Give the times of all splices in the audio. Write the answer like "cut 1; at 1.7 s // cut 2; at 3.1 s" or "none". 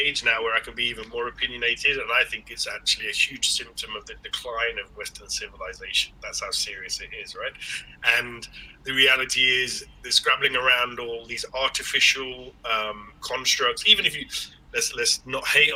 none